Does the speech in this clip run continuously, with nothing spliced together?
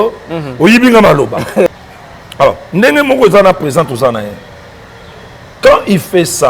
no; 1 cut; at 1.8 s

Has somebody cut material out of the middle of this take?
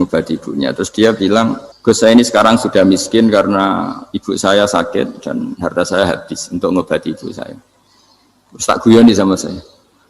yes; 1 cut; at 1.7 s

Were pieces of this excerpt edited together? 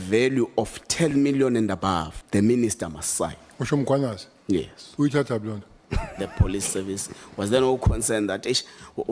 yes; 3 cuts; at 2.2 s, 3.5 s, 6.2 s

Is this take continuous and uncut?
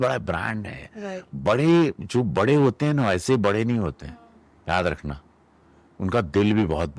yes; 0 cuts

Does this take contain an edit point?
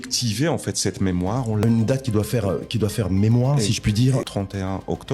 yes; 2 cuts; at 1.6 s, 4.3 s

